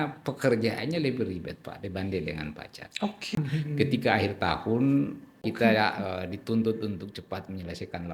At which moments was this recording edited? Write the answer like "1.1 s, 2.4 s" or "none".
3.3 s, 5.5 s

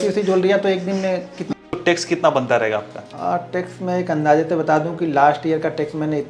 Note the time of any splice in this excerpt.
1.5 s, 3.0 s

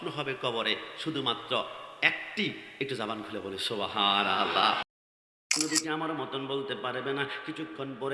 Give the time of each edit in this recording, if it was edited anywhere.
5.3 s

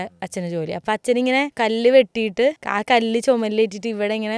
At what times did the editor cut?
0.8 s, 1.5 s, 2.7 s

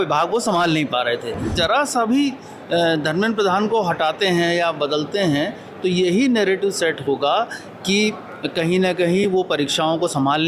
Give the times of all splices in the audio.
1.5 s

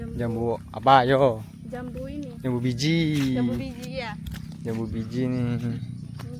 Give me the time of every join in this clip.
none

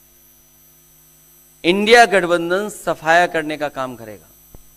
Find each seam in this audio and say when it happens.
none

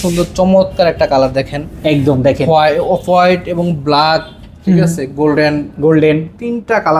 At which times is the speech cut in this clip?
none

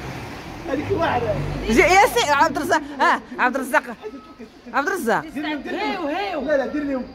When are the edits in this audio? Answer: none

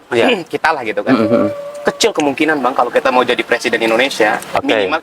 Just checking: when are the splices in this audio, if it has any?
none

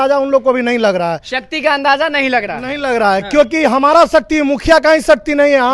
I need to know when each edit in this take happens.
none

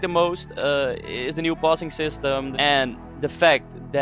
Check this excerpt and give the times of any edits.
2.5 s

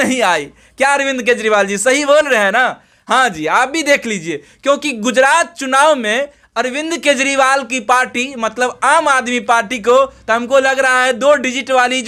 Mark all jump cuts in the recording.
none

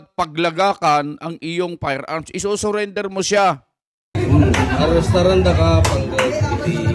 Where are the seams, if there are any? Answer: 4.1 s

